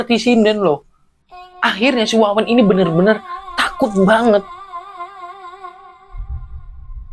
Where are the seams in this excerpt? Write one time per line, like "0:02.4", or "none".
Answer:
none